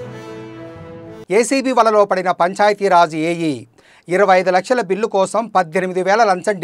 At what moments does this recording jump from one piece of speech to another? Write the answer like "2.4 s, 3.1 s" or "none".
1.1 s